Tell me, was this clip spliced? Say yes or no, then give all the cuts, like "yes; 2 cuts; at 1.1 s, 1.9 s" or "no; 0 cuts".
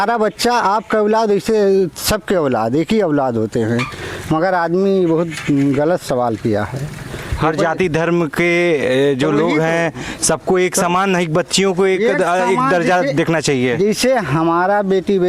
no; 0 cuts